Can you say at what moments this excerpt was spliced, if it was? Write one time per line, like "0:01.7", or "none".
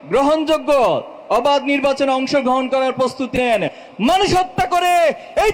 none

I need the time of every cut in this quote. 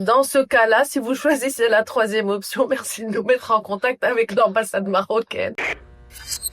0:05.6

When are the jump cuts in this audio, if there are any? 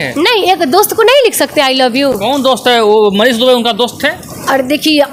none

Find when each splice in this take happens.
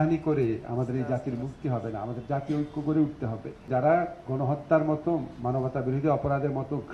0:03.6

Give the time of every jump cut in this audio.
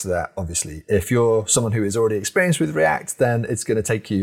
none

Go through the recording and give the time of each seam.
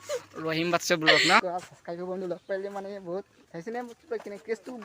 0:01.4
0:03.4

